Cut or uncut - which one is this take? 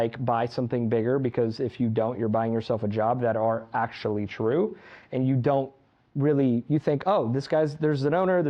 uncut